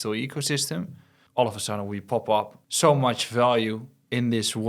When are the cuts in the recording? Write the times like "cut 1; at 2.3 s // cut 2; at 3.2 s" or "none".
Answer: cut 1; at 1.2 s // cut 2; at 2.6 s